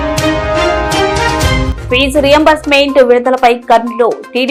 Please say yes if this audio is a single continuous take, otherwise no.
yes